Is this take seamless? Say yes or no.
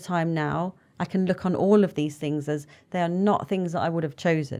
yes